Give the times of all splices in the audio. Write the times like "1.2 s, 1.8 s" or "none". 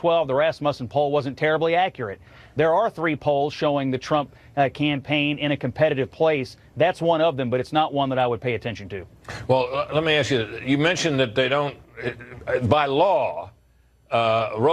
none